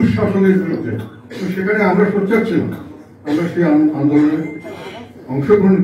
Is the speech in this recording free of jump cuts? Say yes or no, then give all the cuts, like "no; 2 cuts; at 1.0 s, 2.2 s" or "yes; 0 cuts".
yes; 0 cuts